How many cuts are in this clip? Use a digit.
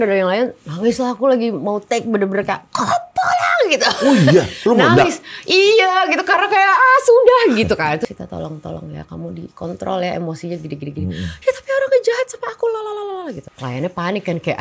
2